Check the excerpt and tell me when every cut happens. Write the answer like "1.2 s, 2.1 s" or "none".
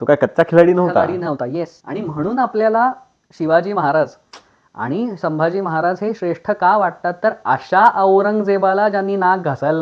none